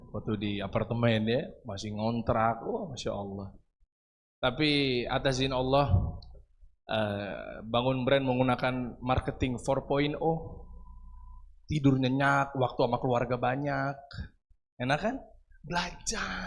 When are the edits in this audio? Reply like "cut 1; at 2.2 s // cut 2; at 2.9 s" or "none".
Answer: none